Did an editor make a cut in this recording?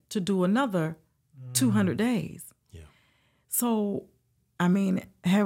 no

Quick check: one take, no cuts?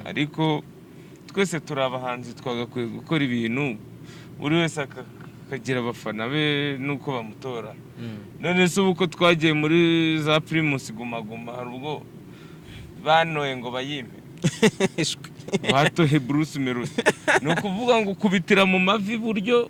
yes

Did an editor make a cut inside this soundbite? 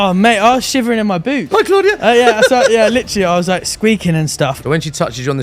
yes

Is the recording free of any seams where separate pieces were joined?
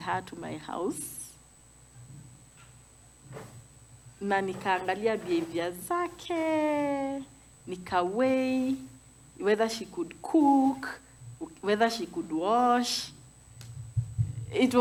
yes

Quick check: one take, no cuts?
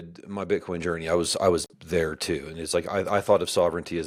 yes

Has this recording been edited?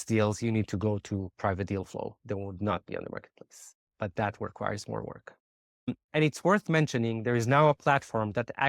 yes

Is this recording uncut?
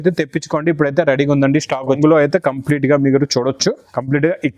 no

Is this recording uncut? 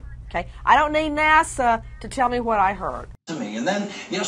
no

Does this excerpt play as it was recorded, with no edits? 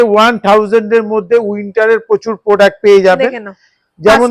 yes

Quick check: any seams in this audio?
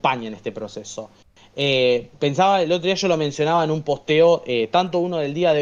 no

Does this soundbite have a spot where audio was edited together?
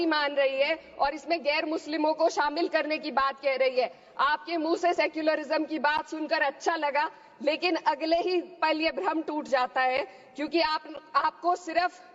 no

